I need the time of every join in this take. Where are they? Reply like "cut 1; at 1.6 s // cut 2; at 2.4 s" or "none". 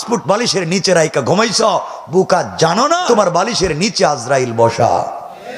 cut 1; at 3.0 s